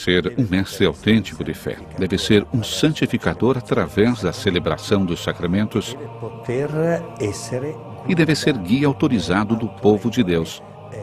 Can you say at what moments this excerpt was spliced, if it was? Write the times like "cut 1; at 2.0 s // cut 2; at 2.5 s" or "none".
none